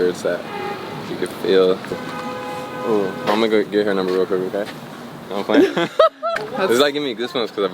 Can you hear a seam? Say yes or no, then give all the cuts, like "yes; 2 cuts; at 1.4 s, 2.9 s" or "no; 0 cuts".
yes; 2 cuts; at 2.0 s, 6.4 s